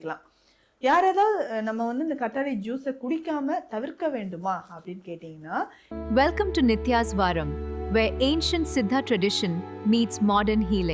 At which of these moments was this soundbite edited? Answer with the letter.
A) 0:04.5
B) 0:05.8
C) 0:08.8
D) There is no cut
B